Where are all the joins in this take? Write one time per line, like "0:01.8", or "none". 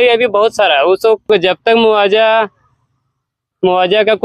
0:01.3

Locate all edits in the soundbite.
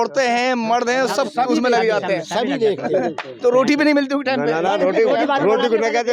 none

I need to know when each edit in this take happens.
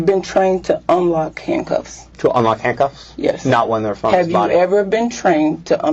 none

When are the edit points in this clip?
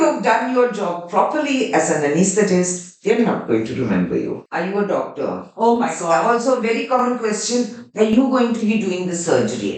0:04.4

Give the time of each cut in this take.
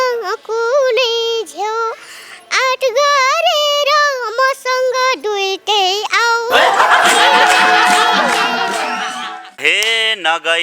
0:09.6

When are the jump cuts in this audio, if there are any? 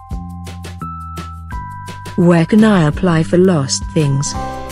0:02.1

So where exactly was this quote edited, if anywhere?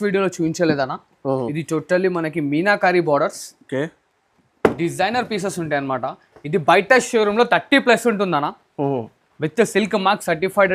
none

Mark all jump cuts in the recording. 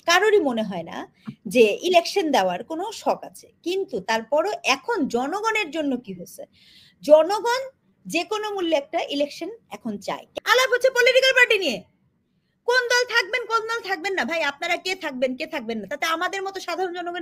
0:10.3

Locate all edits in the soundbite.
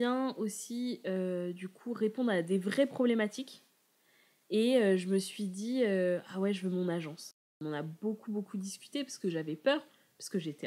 0:07.4

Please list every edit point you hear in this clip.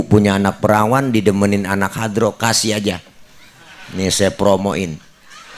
none

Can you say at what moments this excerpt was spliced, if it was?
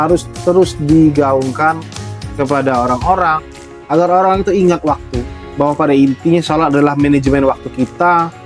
none

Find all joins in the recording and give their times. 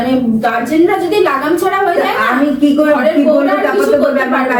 none

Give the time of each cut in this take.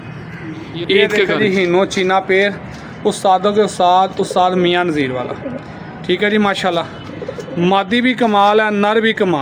0:01.4

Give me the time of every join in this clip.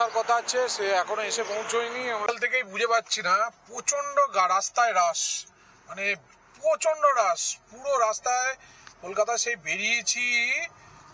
0:02.2

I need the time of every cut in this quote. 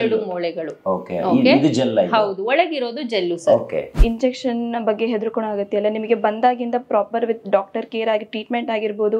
0:03.9

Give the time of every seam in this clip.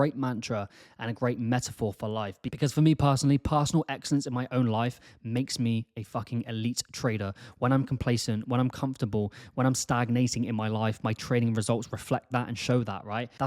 0:02.5

